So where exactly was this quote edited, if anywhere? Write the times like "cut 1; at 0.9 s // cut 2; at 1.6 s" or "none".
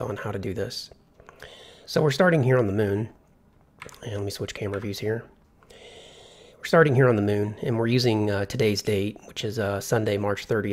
cut 1; at 6.1 s